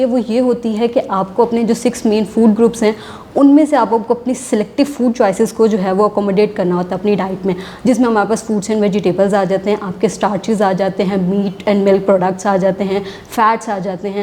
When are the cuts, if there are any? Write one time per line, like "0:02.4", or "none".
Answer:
none